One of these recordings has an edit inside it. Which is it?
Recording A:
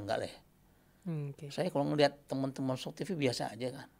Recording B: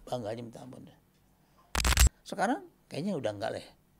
B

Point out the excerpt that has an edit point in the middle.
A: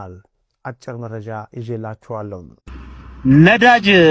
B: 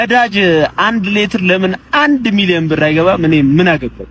A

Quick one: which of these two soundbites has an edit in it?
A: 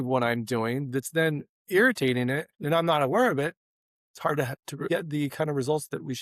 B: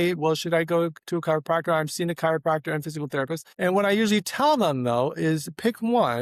A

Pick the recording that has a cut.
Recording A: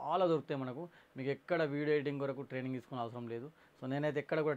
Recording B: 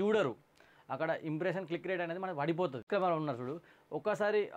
B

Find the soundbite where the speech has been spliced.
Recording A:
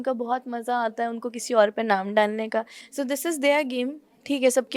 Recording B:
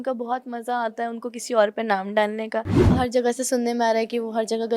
B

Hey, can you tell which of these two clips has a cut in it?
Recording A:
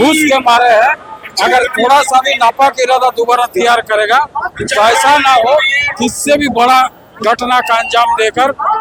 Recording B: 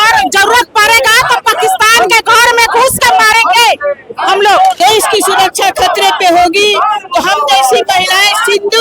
B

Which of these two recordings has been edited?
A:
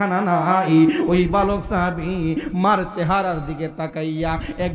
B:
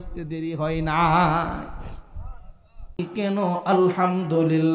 B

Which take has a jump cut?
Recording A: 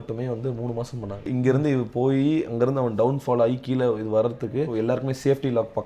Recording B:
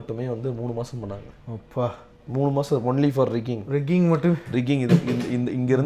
A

